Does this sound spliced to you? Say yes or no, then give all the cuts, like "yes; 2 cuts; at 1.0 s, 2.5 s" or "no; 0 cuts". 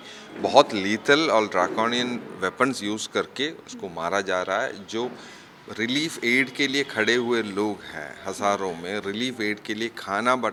no; 0 cuts